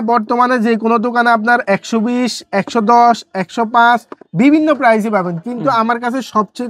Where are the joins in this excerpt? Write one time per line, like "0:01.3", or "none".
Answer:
none